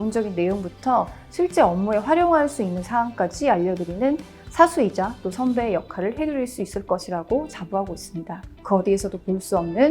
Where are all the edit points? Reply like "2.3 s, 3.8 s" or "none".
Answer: 8.5 s